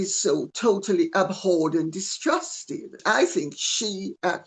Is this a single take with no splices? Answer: no; 1 cut; at 2.9 s

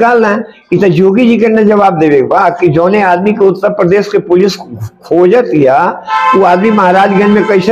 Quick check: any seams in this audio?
no; 0 cuts

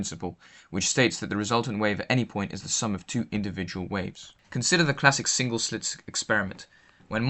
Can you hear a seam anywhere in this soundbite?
no; 0 cuts

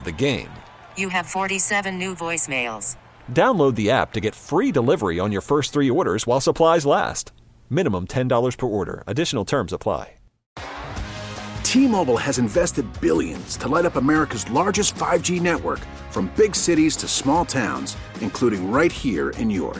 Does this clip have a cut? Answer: yes; 1 cut; at 10.6 s

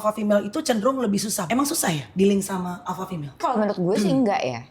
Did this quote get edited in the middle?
yes; 2 cuts; at 1.4 s, 3.4 s

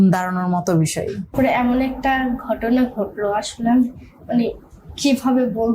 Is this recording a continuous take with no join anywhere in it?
no; 1 cut; at 1.3 s

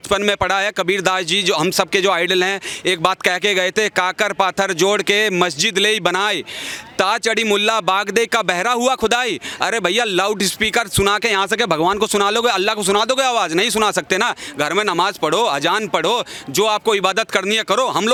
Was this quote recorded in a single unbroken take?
yes; 0 cuts

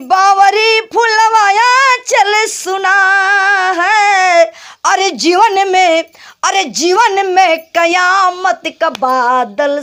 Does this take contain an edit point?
no; 0 cuts

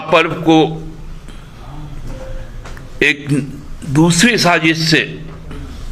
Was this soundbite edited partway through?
no; 0 cuts

